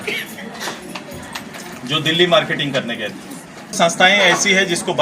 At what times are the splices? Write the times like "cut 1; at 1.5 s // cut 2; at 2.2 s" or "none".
cut 1; at 3.7 s

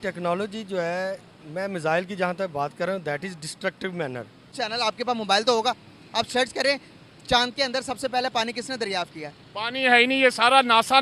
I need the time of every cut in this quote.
cut 1; at 4.5 s

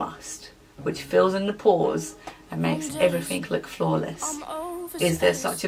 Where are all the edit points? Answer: none

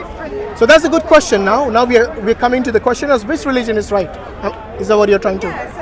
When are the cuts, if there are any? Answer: none

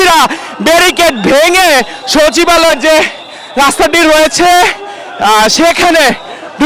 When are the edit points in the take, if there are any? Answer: none

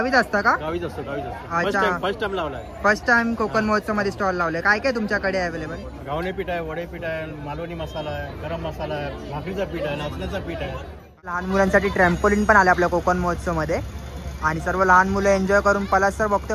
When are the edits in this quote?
cut 1; at 11.3 s

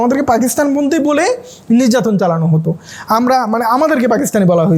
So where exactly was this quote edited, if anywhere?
none

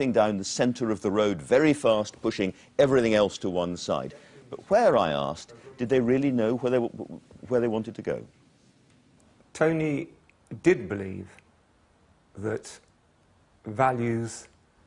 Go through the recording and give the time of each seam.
cut 1; at 7.2 s

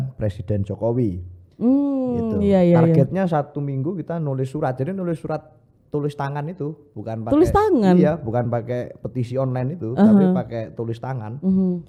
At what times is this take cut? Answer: none

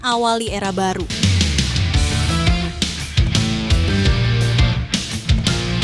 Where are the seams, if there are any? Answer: cut 1; at 1.1 s

